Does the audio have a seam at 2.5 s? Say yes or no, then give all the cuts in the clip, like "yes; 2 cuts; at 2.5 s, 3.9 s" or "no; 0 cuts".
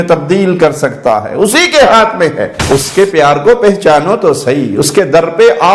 yes; 1 cut; at 2.5 s